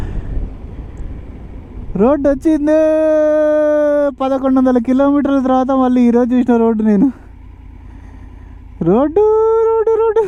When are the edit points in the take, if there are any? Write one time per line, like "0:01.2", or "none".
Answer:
none